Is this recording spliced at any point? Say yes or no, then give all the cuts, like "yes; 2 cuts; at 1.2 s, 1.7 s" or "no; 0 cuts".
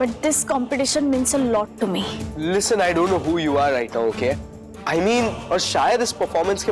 yes; 1 cut; at 5.4 s